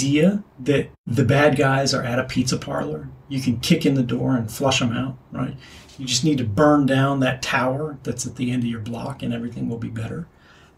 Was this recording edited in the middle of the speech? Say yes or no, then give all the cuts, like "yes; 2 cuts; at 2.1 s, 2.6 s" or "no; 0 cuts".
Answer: yes; 1 cut; at 1.0 s